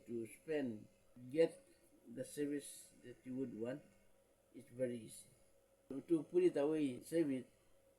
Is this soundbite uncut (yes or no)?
no